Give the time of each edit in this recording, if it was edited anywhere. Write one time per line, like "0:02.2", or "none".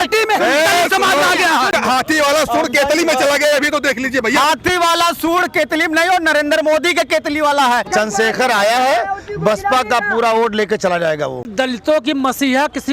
0:01.7
0:07.9
0:11.5